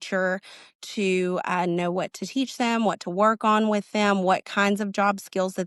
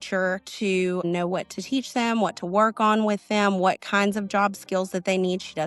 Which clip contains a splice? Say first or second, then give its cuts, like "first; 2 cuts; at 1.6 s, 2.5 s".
second; 1 cut; at 1.0 s